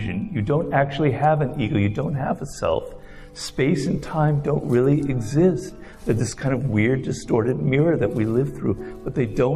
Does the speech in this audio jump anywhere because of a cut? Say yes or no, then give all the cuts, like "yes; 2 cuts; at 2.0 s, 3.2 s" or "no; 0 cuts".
no; 0 cuts